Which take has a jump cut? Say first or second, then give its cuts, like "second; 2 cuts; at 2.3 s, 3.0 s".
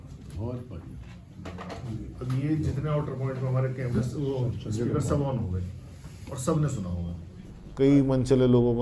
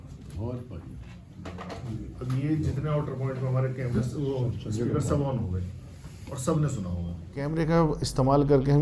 first; 1 cut; at 7.3 s